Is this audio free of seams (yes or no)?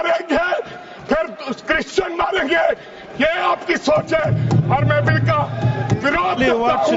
yes